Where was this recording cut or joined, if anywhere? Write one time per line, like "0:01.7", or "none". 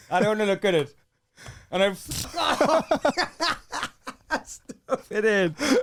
none